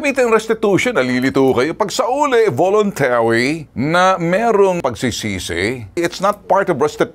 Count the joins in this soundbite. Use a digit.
1